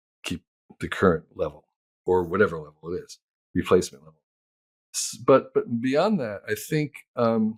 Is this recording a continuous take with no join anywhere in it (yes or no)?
yes